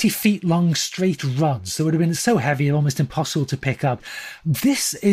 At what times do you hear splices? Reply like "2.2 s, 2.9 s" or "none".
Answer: 4.1 s